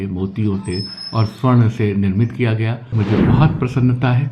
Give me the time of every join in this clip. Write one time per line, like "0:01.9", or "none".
0:03.0